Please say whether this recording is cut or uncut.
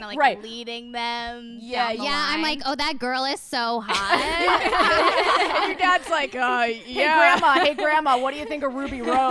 uncut